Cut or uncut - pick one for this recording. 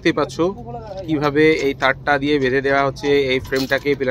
uncut